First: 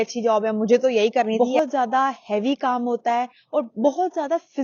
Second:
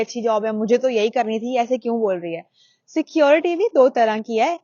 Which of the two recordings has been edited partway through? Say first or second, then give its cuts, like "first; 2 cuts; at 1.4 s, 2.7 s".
first; 1 cut; at 1.4 s